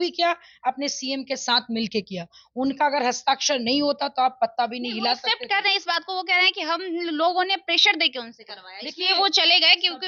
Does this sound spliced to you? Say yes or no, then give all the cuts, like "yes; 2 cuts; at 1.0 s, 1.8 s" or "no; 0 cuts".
no; 0 cuts